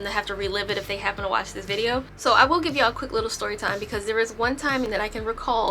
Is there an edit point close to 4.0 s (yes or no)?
no